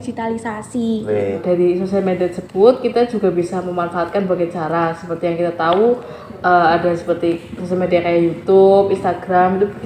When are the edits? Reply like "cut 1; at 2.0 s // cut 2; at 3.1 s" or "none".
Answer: cut 1; at 1.4 s